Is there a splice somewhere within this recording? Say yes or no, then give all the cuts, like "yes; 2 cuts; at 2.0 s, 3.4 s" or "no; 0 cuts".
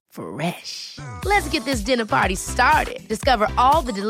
no; 0 cuts